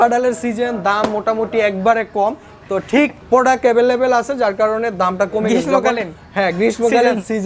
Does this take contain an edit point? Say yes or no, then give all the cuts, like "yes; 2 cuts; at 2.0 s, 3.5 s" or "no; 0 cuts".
yes; 1 cut; at 3.2 s